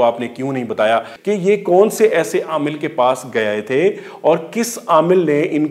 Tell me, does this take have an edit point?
yes; 1 cut; at 1.1 s

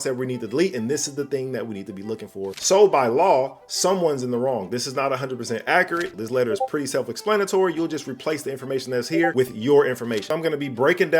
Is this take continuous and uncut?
no; 3 cuts; at 2.5 s, 6.1 s, 10.3 s

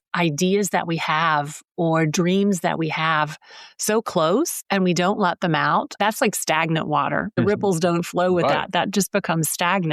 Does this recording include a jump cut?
yes; 3 cuts; at 4.6 s, 5.9 s, 7.4 s

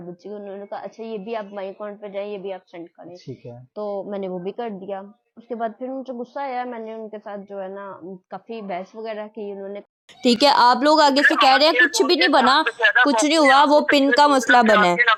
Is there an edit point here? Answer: no; 0 cuts

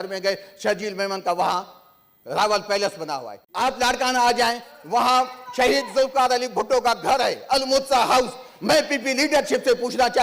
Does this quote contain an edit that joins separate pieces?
yes; 1 cut; at 3.4 s

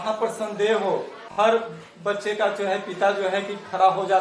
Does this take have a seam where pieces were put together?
yes; 1 cut; at 1.2 s

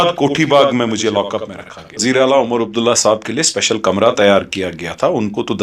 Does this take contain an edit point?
yes; 1 cut; at 2.0 s

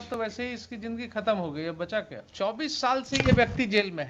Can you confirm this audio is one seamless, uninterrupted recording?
no; 1 cut; at 2.2 s

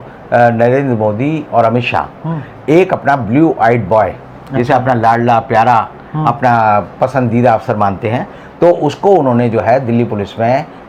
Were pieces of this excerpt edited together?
no; 0 cuts

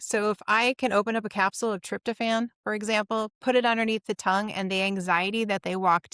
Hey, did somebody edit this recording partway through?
no; 0 cuts

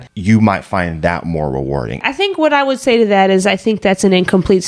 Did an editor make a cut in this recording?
no; 0 cuts

